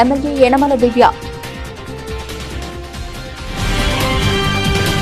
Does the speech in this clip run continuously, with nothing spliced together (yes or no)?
no